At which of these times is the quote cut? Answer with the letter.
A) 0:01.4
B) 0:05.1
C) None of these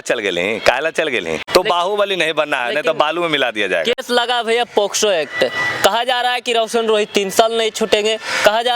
A